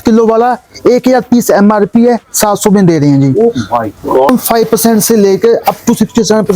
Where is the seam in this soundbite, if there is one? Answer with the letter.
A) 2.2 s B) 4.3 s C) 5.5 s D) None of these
B